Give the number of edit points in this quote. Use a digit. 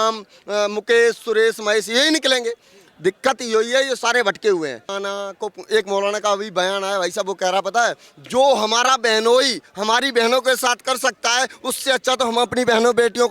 1